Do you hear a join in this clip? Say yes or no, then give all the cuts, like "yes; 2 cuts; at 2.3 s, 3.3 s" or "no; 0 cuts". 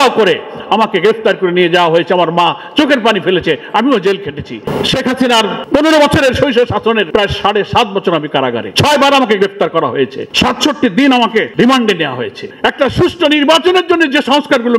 yes; 7 cuts; at 4.7 s, 5.6 s, 7.1 s, 8.7 s, 10.2 s, 11.5 s, 12.4 s